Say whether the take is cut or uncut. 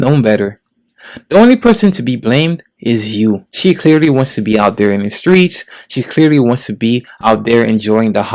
cut